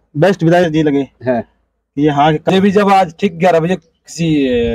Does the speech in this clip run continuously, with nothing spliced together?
no; 1 cut; at 2.5 s

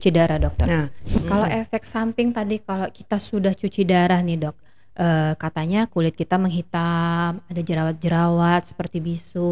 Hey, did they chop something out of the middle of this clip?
yes; 1 cut; at 1.2 s

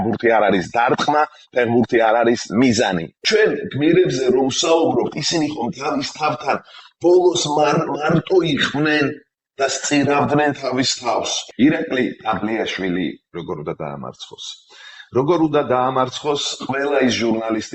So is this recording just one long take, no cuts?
no; 2 cuts; at 3.1 s, 11.4 s

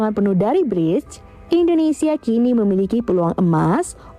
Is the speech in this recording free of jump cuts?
yes; 0 cuts

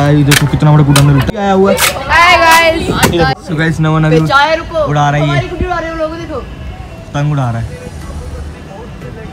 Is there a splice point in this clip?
yes; 3 cuts; at 1.3 s, 3.4 s, 7.1 s

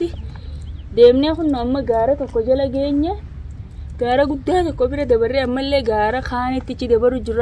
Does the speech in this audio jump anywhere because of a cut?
no; 0 cuts

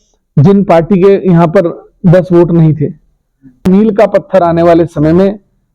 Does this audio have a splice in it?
yes; 1 cut; at 3.6 s

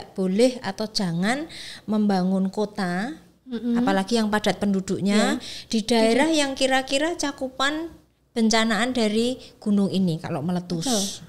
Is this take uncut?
yes; 0 cuts

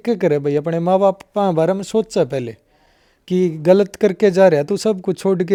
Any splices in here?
no; 0 cuts

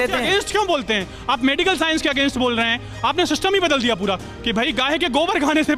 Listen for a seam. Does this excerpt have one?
no; 0 cuts

